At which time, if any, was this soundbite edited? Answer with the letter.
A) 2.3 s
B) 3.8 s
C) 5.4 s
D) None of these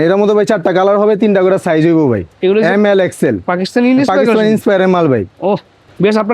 D